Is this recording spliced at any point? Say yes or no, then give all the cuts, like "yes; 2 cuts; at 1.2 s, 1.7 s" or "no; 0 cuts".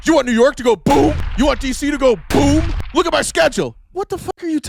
no; 0 cuts